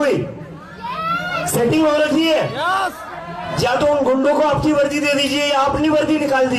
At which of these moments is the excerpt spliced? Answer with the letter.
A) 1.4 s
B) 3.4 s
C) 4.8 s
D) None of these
B